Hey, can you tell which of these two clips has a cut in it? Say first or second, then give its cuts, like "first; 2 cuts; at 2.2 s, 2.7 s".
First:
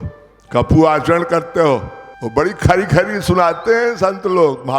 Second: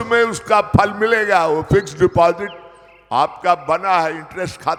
first; 1 cut; at 2.1 s